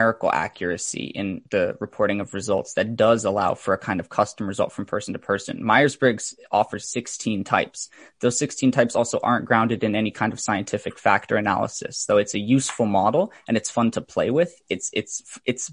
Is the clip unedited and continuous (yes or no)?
no